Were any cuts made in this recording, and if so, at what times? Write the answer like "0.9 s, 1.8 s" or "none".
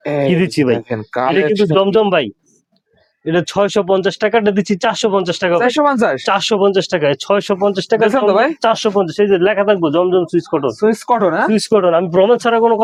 none